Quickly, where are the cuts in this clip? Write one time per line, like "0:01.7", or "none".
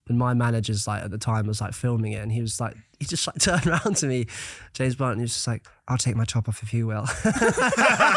none